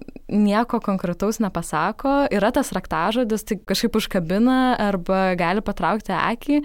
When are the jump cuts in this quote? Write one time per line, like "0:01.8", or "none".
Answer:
0:03.7